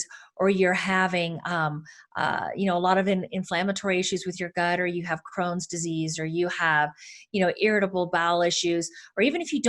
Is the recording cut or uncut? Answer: uncut